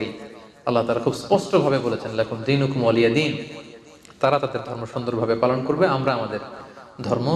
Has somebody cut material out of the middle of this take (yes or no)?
no